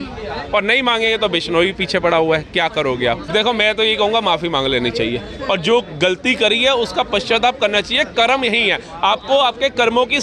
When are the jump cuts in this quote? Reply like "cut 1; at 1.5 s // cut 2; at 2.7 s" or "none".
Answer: cut 1; at 3.2 s